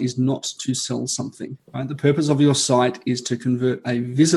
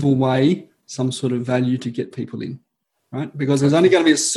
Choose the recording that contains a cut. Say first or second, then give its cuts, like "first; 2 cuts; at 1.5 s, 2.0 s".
first; 1 cut; at 1.6 s